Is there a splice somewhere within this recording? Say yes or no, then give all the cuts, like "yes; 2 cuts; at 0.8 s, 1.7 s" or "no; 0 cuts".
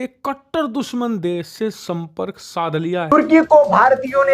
yes; 1 cut; at 3.1 s